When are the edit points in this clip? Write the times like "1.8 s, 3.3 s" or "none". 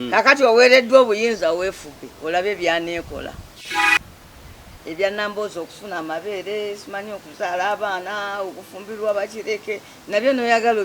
3.7 s